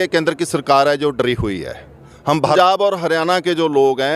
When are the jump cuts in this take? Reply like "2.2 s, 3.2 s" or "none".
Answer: 2.6 s